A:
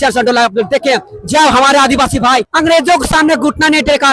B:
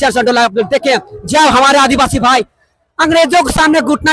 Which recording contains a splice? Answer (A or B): A